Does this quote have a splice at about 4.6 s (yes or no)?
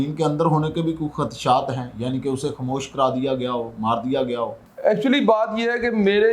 yes